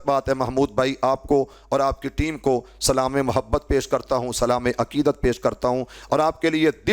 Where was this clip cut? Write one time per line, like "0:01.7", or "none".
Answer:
none

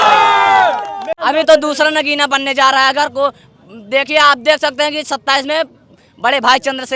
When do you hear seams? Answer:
0:01.2

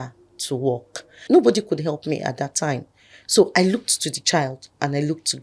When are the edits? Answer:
0:01.1

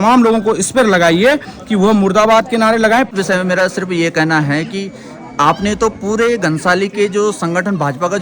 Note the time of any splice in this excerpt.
0:03.1

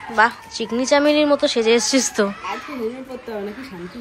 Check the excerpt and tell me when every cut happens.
none

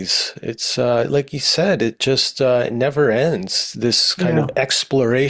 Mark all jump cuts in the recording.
none

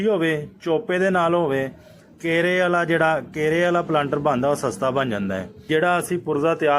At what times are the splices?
0:05.7

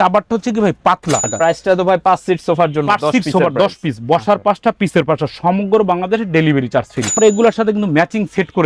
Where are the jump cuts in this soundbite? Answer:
0:01.3
0:07.2

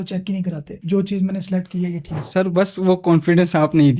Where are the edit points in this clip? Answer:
none

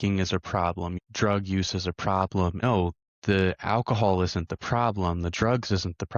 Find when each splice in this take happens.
0:01.0
0:02.6

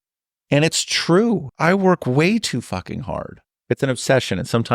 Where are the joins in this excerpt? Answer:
0:01.6
0:03.5

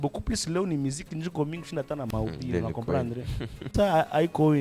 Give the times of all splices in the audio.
0:03.7

